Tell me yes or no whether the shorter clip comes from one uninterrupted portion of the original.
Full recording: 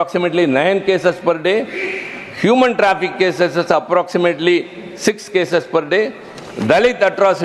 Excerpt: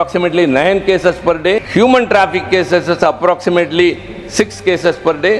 no